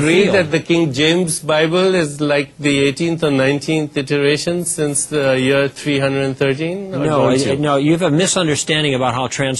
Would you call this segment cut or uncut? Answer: uncut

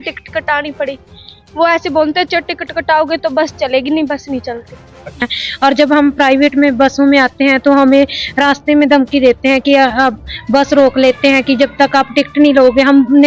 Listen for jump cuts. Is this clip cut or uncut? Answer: cut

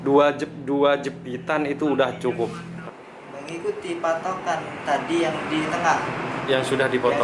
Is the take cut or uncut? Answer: cut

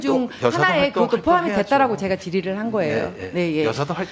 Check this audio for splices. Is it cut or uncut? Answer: uncut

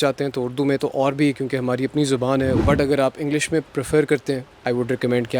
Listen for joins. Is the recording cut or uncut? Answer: cut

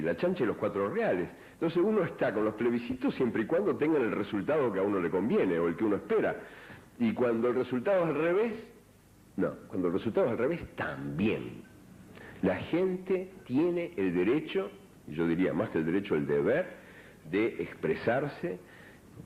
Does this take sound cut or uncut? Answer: uncut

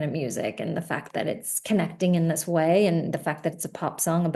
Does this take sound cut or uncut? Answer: uncut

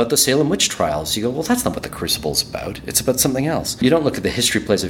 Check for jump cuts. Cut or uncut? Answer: cut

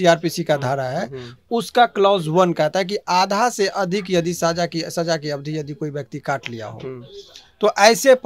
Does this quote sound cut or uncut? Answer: uncut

